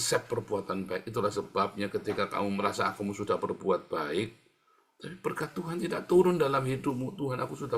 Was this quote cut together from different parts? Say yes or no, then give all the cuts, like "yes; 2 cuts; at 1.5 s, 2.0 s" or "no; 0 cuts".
no; 0 cuts